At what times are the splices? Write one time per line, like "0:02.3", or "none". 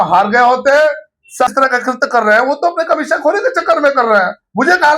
0:01.4